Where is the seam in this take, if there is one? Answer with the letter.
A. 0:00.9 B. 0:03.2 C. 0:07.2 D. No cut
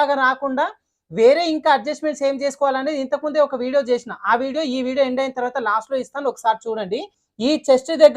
C